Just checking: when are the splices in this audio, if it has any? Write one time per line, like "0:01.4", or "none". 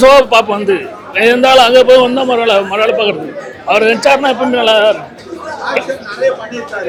none